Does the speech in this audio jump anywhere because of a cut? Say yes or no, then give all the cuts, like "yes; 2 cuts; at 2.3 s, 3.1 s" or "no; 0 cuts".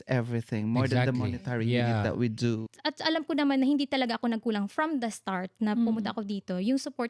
yes; 1 cut; at 2.6 s